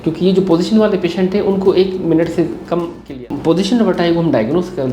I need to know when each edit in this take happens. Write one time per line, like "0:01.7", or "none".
0:03.1